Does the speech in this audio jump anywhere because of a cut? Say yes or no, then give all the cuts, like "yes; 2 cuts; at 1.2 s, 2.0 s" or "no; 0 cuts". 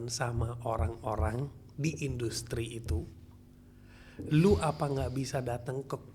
no; 0 cuts